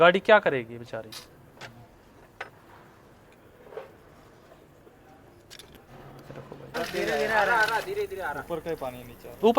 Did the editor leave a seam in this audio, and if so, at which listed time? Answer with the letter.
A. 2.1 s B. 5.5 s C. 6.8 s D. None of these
C